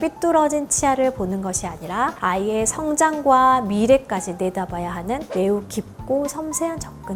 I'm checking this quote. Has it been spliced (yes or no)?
no